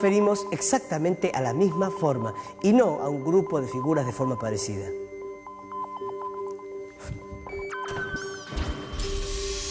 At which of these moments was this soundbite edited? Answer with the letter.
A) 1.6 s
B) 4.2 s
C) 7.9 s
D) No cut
C